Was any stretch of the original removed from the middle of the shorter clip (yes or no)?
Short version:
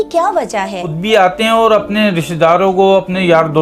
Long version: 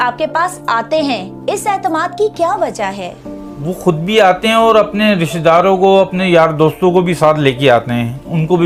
yes